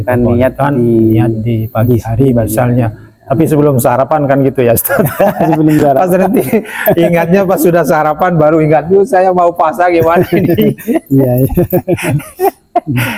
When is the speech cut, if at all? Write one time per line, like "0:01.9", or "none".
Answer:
none